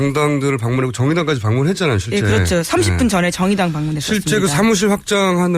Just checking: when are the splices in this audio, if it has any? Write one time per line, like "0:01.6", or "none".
0:01.8